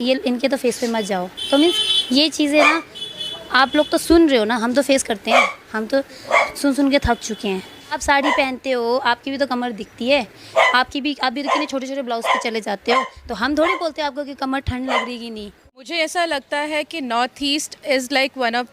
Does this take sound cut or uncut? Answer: cut